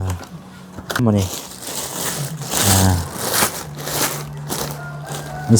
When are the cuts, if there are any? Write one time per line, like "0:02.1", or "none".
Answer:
0:01.0